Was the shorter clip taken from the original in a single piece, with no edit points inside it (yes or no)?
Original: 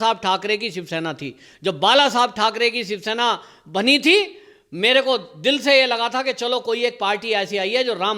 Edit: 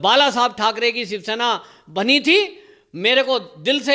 yes